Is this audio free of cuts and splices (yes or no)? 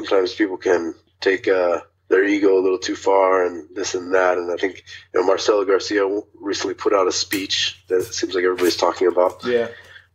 no